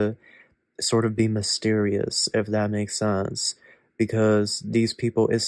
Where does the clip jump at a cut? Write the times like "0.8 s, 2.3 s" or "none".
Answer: none